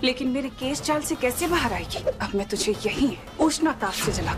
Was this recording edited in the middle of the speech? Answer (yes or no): yes